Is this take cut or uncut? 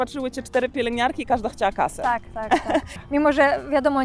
cut